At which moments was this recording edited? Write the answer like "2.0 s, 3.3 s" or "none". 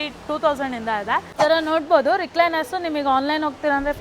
1.3 s